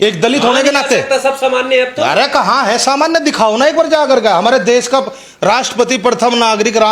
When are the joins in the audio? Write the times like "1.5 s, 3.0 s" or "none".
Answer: none